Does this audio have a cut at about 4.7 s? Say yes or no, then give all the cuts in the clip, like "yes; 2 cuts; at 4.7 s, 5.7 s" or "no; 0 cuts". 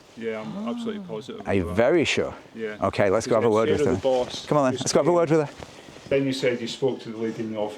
no; 1 cut; at 6.1 s